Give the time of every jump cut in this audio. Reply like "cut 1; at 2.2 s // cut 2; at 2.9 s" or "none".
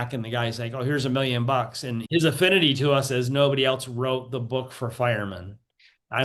cut 1; at 2.0 s